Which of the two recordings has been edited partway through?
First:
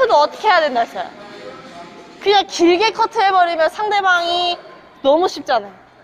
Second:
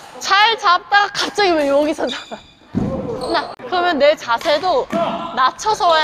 second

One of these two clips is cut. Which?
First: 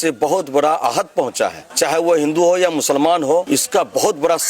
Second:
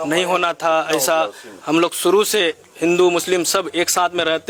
first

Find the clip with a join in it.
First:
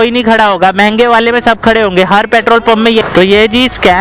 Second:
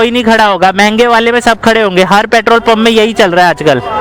first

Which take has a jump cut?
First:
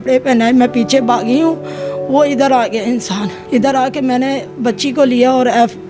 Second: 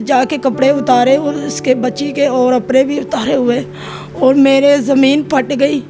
first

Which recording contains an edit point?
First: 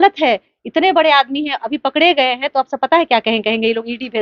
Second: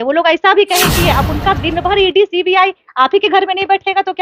second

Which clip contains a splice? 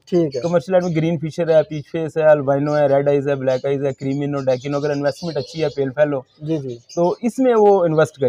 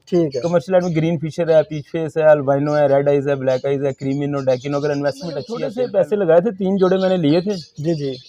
second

